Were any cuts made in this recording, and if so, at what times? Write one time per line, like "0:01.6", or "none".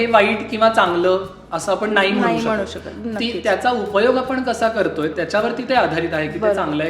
0:05.1